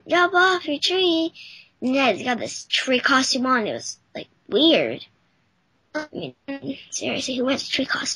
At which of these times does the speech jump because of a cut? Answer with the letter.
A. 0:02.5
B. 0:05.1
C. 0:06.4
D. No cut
A